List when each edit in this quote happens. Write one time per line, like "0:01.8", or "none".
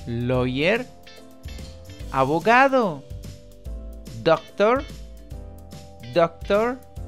none